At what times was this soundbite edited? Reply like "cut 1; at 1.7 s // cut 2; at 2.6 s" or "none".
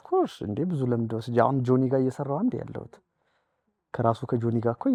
none

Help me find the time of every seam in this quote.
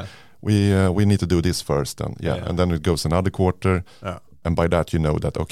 cut 1; at 4.3 s

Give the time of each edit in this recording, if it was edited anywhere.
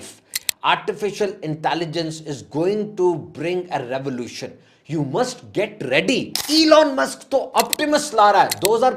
cut 1; at 6.4 s

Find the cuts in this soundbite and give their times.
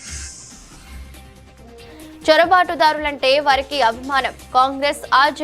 cut 1; at 1.6 s

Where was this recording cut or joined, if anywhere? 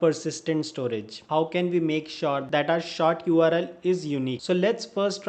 cut 1; at 1.2 s // cut 2; at 4.3 s

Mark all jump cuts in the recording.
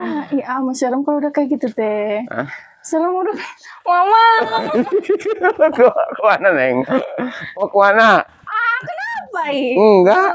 none

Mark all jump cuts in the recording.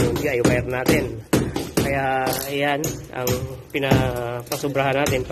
none

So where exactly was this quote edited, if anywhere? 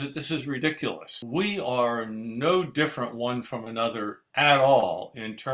cut 1; at 1.2 s

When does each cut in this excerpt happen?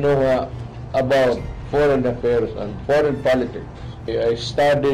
cut 1; at 1.5 s // cut 2; at 2.7 s // cut 3; at 4.1 s

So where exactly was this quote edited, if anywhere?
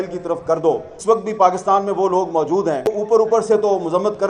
cut 1; at 0.9 s // cut 2; at 2.9 s

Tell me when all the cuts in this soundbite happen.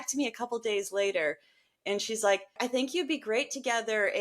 cut 1; at 2.6 s

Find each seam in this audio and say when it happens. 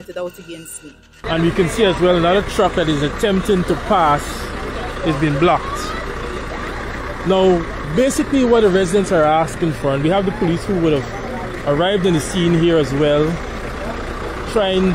cut 1; at 1.1 s

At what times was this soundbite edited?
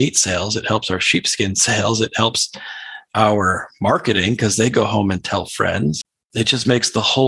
cut 1; at 6.1 s

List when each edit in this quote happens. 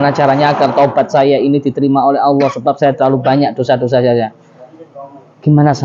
none

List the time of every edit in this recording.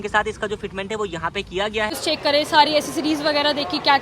cut 1; at 2.0 s

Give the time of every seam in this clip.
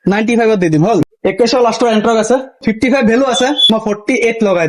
cut 1; at 1.0 s // cut 2; at 2.6 s // cut 3; at 3.7 s

